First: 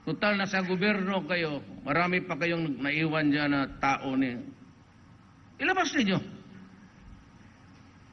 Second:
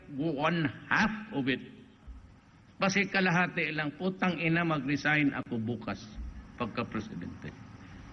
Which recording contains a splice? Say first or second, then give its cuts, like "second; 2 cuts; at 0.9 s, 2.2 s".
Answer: second; 1 cut; at 6.7 s